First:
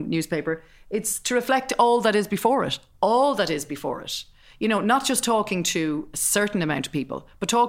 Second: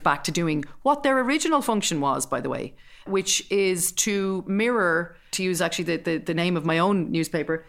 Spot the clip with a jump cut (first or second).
second